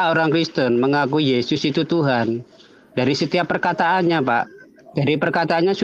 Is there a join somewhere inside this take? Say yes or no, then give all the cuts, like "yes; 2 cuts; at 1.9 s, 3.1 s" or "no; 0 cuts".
no; 0 cuts